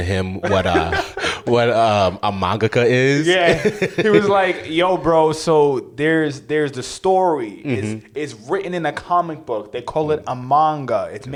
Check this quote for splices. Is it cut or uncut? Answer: uncut